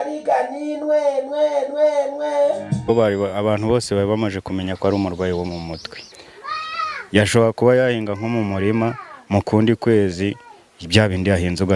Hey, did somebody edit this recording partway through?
yes; 1 cut; at 2.9 s

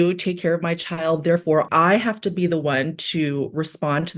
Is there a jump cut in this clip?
yes; 1 cut; at 1.7 s

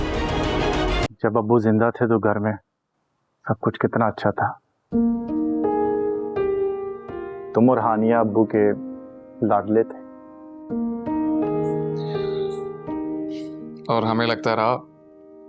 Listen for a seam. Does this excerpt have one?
yes; 1 cut; at 1.1 s

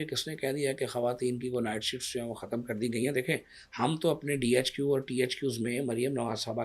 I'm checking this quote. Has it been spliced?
no; 0 cuts

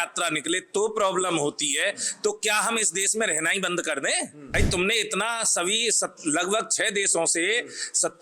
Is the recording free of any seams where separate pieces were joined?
no; 1 cut; at 4.5 s

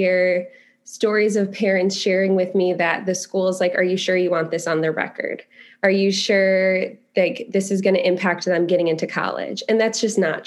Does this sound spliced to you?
no; 0 cuts

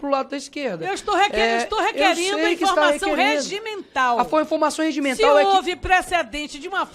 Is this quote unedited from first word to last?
yes; 0 cuts

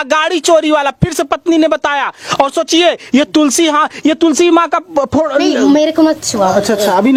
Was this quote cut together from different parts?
no; 0 cuts

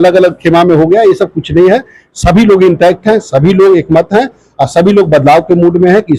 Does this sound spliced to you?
no; 0 cuts

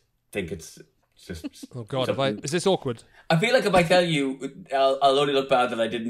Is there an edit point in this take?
yes; 1 cut; at 2.5 s

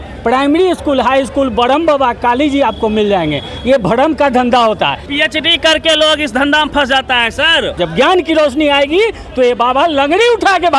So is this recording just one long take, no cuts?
no; 2 cuts; at 5.0 s, 7.8 s

